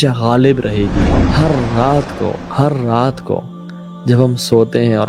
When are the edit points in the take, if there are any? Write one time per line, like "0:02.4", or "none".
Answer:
0:01.2